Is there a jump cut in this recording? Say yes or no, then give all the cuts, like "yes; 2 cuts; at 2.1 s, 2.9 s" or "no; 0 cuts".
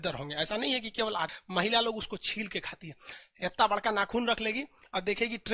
yes; 1 cut; at 1.3 s